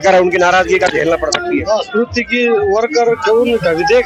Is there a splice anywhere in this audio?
no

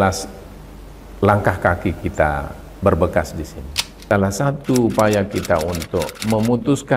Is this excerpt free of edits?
no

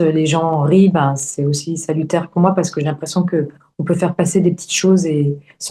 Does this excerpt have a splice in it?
no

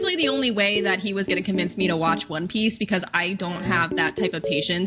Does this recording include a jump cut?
no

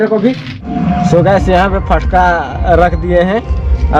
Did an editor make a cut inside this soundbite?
yes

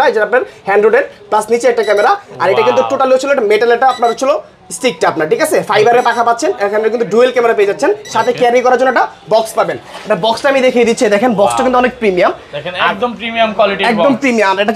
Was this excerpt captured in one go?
yes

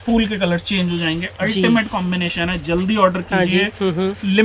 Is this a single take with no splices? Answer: yes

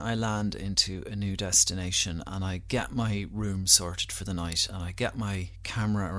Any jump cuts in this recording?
no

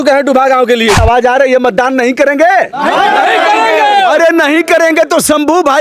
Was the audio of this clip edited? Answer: yes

